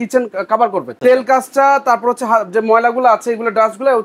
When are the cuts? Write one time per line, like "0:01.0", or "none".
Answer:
0:01.0